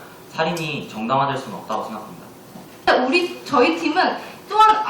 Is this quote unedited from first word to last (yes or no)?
no